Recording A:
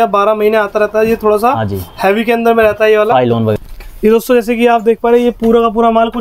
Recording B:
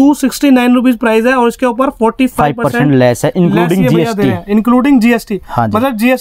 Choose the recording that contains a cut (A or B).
A